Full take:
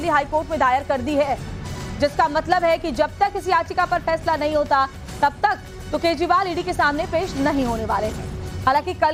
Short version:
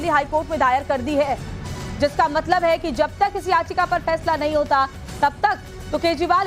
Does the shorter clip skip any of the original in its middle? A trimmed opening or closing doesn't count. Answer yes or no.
no